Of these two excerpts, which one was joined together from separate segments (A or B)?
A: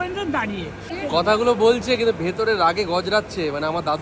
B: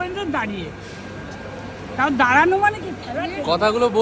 A